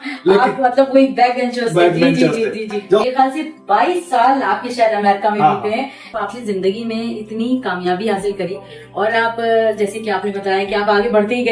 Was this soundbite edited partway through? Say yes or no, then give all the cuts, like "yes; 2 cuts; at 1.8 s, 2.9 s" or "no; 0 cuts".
yes; 2 cuts; at 3.0 s, 6.0 s